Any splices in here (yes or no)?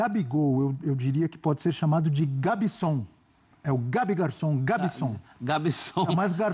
no